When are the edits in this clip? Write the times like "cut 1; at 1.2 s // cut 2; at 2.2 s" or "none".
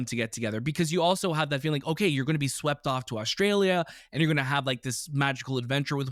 none

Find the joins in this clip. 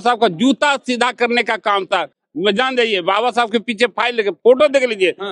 none

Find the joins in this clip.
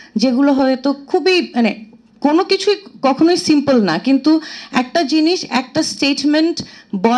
none

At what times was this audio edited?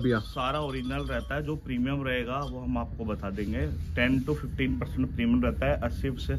none

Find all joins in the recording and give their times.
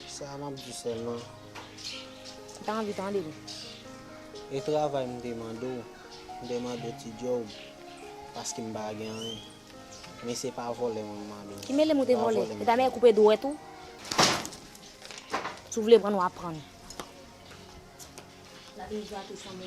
cut 1; at 14.0 s

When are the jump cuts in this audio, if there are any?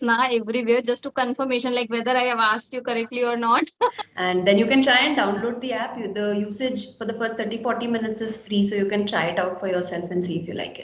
cut 1; at 4.0 s

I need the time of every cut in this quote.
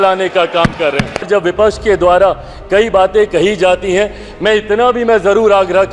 cut 1; at 1.3 s

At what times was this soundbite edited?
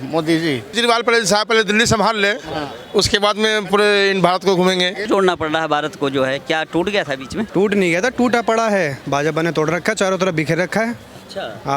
cut 1; at 0.8 s // cut 2; at 5.0 s // cut 3; at 7.5 s // cut 4; at 9.0 s

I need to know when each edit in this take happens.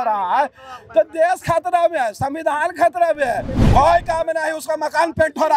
cut 1; at 3.6 s

